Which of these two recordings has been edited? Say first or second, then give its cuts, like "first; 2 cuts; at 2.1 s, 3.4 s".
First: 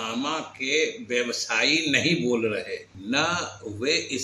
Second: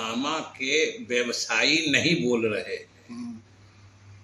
first; 1 cut; at 2.9 s